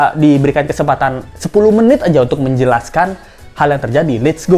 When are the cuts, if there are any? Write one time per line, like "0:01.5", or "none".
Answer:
none